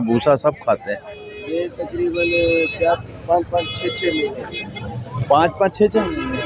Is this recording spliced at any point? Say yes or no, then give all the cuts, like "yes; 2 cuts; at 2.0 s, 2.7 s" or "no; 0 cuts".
yes; 1 cut; at 1.4 s